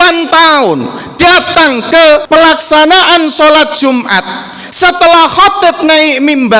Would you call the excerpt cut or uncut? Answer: cut